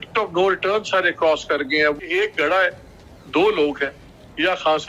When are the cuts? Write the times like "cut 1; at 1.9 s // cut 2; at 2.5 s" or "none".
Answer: cut 1; at 2.0 s